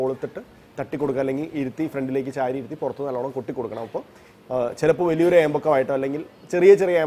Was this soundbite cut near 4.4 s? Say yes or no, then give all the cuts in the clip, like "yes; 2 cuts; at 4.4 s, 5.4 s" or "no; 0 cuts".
no; 0 cuts